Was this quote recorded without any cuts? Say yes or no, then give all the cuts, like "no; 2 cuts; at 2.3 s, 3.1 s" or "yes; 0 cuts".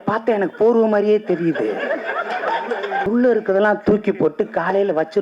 no; 1 cut; at 3.1 s